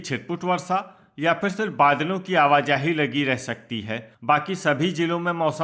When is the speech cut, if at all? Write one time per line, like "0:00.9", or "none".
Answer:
none